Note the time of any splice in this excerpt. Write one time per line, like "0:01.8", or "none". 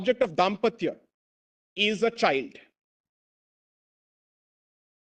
none